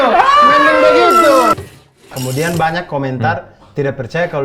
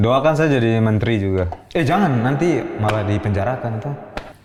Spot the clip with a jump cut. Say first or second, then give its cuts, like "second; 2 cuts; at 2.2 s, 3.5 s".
first; 1 cut; at 2.0 s